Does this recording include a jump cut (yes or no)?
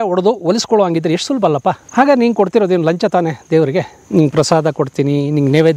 yes